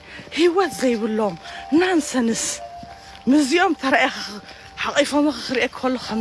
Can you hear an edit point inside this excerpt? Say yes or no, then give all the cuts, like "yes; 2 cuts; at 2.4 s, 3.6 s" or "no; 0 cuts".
no; 0 cuts